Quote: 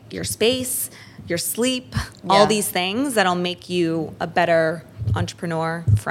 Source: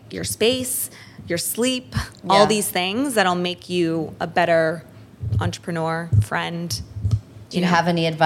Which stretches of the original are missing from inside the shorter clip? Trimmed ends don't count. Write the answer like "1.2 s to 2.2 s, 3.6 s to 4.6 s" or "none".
4.9 s to 5.2 s